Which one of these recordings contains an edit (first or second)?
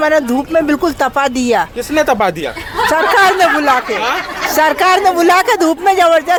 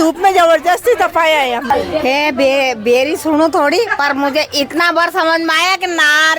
second